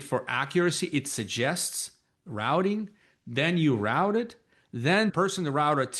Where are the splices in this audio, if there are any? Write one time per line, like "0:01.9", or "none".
0:05.1